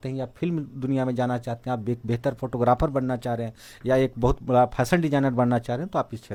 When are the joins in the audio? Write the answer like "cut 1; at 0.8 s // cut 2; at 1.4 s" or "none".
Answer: none